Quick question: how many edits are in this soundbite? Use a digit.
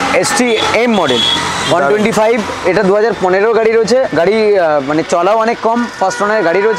1